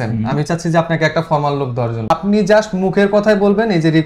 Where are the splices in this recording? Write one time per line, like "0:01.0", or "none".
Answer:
0:02.1